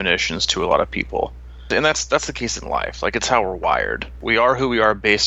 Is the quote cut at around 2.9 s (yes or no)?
no